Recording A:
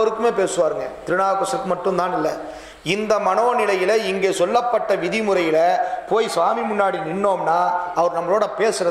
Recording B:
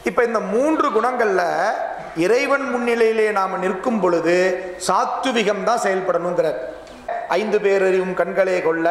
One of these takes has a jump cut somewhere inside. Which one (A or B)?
B